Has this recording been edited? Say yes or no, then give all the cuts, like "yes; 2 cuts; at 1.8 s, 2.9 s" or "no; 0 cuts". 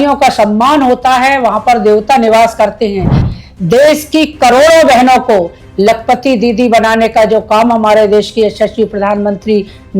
yes; 1 cut; at 3.3 s